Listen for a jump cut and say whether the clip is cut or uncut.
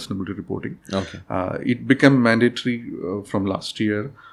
uncut